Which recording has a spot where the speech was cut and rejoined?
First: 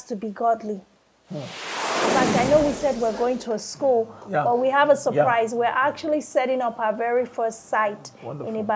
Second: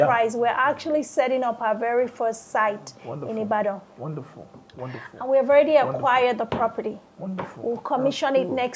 first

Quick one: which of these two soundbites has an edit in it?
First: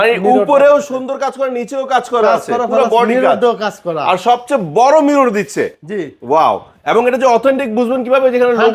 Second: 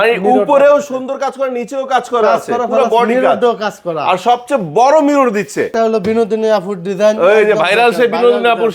second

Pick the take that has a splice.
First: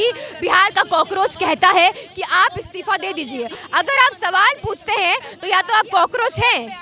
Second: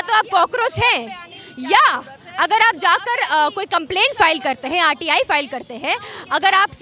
first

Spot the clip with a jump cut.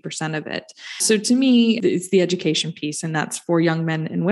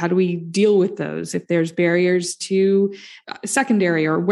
first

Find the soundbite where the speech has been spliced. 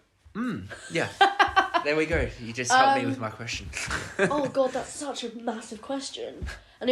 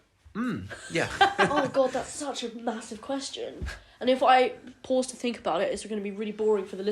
second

